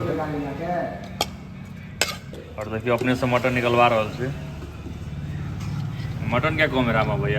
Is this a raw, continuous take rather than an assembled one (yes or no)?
no